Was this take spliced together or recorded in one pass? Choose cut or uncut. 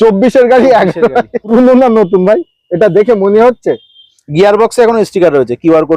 cut